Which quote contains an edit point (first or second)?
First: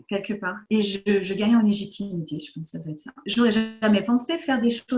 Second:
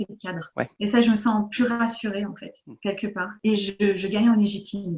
first